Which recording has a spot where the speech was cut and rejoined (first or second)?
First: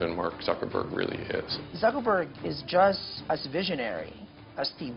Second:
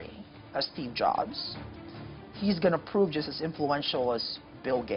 first